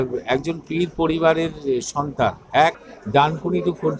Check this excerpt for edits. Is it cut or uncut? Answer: cut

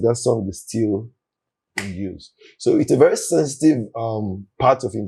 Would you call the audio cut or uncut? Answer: uncut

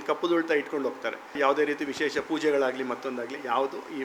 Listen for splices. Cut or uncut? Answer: cut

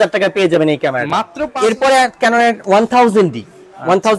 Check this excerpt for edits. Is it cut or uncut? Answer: cut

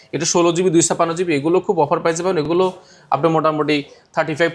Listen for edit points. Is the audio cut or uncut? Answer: uncut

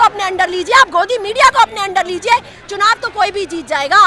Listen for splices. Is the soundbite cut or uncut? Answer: uncut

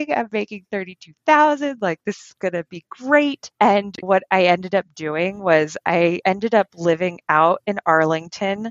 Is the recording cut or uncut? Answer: uncut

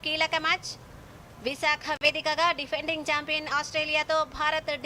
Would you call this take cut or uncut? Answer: uncut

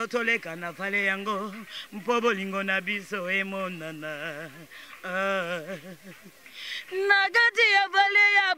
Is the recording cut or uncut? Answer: uncut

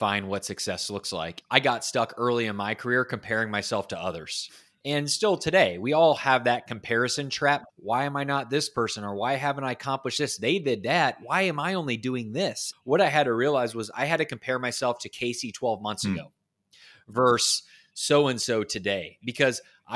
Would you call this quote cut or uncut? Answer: cut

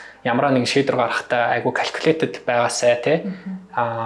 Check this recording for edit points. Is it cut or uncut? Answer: uncut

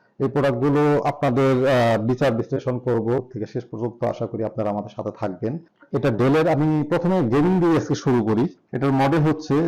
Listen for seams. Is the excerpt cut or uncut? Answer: cut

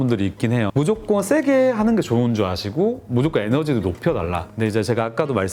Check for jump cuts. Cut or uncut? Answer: uncut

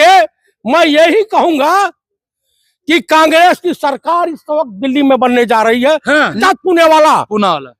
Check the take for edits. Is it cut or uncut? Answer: cut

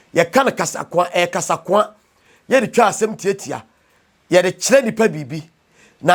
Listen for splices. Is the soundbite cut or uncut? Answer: uncut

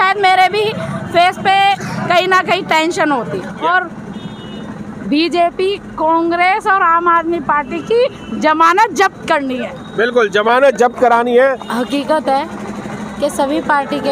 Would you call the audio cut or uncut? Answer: cut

